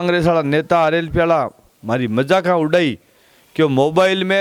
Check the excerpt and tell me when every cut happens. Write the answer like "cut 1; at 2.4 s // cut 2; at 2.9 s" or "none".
none